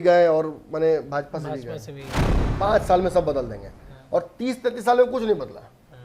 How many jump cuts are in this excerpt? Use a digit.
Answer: 1